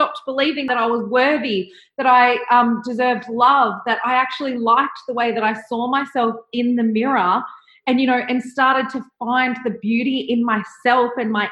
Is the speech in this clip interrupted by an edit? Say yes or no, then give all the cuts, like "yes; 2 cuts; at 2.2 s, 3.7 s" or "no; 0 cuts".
no; 0 cuts